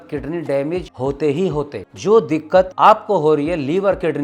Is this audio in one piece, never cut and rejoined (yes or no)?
no